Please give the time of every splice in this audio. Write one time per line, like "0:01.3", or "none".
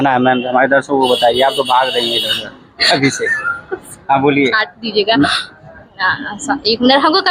none